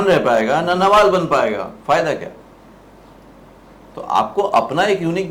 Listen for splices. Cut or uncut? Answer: uncut